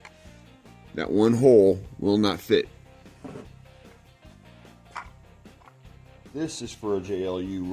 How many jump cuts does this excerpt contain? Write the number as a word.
one